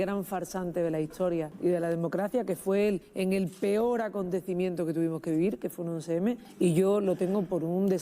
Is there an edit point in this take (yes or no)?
yes